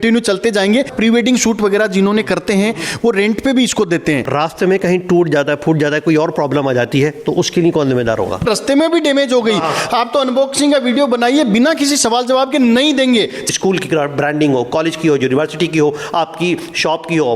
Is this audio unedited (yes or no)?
no